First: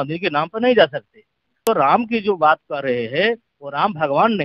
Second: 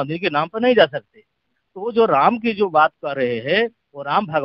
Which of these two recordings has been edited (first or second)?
first